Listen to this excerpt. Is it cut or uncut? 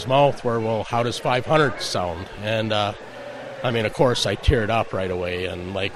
uncut